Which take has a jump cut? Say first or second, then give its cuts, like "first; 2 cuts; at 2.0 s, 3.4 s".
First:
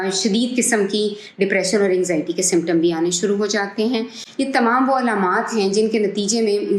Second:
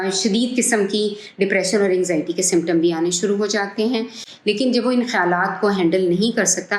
second; 1 cut; at 4.2 s